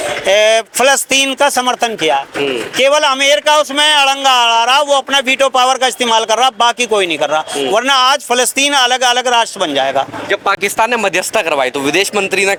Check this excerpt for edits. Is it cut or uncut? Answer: uncut